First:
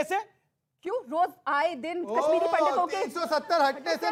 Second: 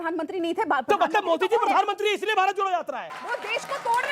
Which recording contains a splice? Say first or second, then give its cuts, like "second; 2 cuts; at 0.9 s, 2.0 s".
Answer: second; 1 cut; at 3.1 s